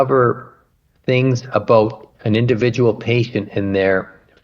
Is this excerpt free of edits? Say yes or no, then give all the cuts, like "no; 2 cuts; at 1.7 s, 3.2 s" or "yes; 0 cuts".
no; 1 cut; at 0.9 s